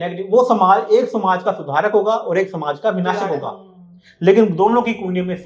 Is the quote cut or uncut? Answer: uncut